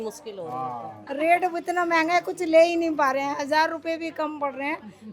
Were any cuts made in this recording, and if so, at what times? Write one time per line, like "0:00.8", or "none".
0:00.9